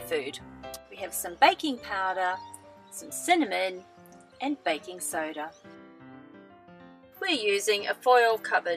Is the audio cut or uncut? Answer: uncut